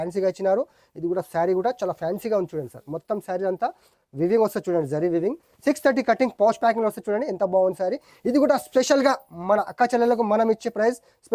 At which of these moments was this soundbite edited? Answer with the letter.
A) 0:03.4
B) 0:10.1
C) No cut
C